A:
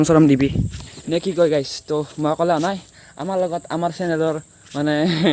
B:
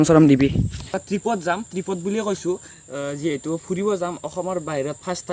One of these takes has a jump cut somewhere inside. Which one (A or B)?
B